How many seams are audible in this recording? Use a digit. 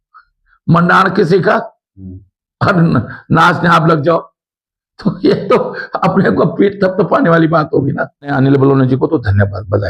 1